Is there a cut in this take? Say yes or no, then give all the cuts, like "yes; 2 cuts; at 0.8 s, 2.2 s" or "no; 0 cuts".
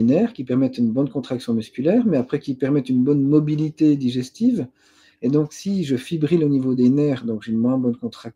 no; 0 cuts